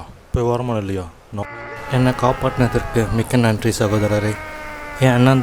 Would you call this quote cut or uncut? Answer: cut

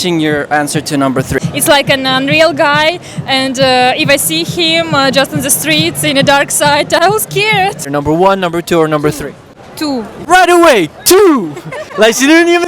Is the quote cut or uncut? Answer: cut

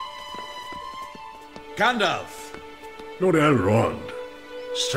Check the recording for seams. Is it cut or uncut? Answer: cut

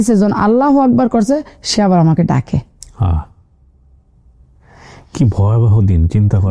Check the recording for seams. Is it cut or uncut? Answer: uncut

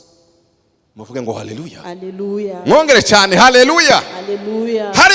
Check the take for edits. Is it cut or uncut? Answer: uncut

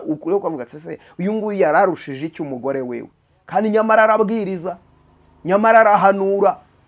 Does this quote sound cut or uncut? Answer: uncut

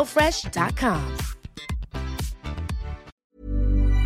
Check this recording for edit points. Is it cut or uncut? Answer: cut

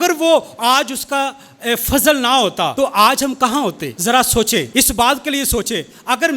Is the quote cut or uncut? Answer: cut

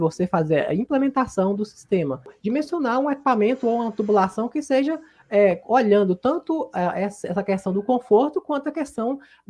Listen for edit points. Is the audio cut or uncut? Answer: cut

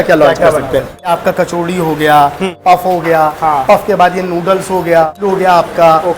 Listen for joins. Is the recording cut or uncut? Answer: cut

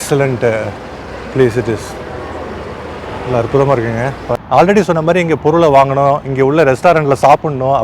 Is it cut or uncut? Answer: cut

